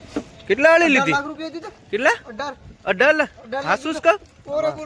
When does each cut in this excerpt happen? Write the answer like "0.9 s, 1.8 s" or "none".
3.0 s